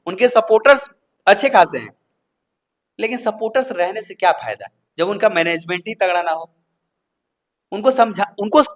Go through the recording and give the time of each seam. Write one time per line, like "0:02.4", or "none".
none